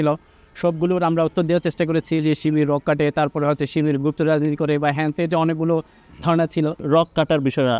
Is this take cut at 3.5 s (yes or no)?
no